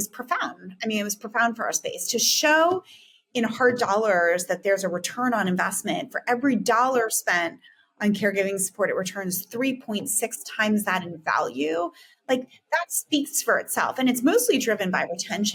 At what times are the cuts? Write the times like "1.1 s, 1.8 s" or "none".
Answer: none